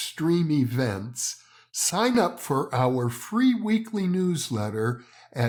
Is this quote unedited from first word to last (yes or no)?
yes